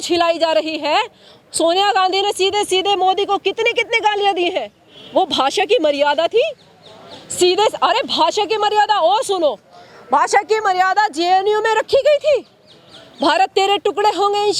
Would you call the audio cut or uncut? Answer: uncut